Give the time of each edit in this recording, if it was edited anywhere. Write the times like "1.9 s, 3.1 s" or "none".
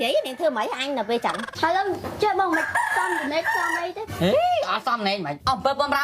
1.5 s